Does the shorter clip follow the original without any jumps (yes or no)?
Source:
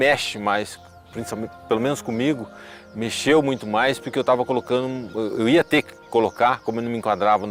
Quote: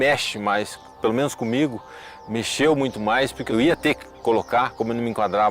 no